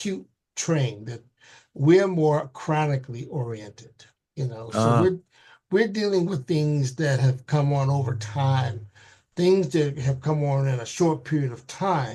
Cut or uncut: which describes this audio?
uncut